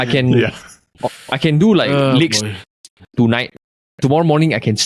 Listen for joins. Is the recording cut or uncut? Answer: uncut